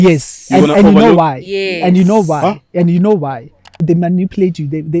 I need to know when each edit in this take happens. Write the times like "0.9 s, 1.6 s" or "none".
3.7 s

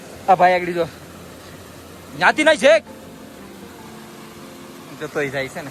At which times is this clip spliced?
none

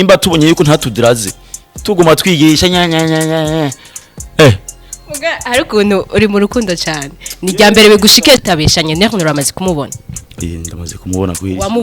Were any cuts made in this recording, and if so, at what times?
8.4 s

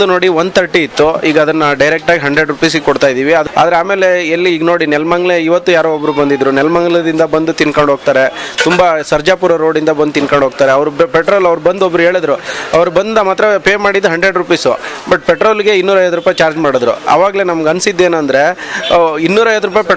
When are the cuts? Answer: 3.5 s

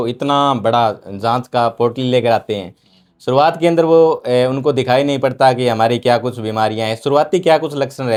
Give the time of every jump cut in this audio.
none

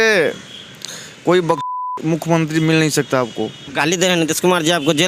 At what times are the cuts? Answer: 3.7 s

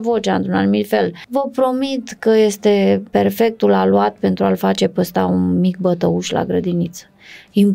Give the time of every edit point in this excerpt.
1.2 s

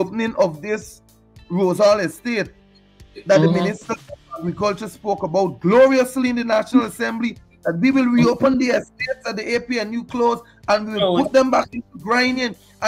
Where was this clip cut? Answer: none

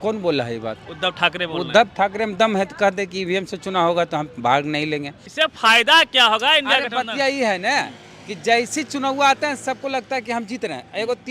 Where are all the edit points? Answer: 5.2 s

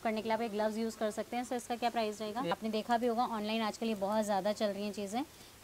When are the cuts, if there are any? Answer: 2.5 s

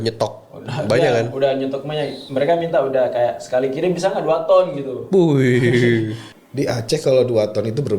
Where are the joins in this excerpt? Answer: 6.2 s

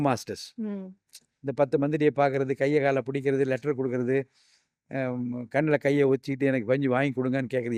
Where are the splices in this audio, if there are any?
none

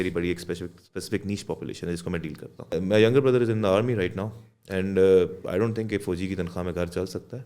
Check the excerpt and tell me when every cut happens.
2.7 s

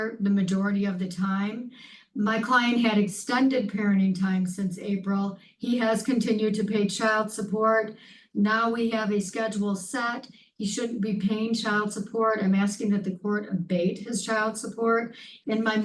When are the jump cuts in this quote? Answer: none

